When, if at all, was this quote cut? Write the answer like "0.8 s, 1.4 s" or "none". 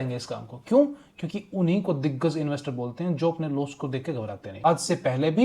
4.5 s